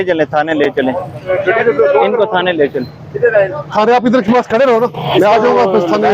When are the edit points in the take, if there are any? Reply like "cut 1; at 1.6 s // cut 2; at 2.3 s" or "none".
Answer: none